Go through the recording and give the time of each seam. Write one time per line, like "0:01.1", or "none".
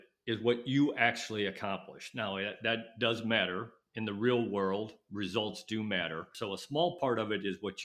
0:06.3